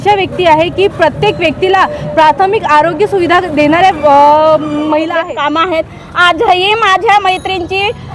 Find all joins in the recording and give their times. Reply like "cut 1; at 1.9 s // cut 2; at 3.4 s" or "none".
cut 1; at 5.2 s